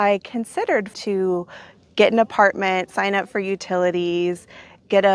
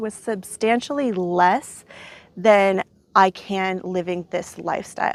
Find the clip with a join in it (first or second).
first